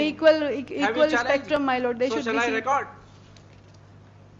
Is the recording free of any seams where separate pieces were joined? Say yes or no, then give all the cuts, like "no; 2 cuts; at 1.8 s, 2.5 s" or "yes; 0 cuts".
yes; 0 cuts